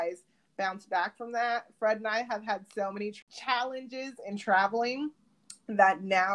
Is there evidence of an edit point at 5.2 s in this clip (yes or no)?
no